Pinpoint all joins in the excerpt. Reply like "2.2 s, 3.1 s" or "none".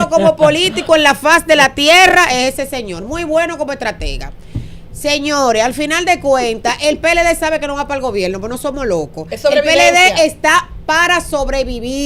none